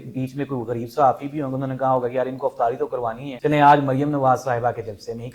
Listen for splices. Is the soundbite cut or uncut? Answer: cut